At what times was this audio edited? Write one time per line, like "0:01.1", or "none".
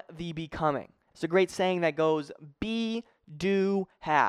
0:01.0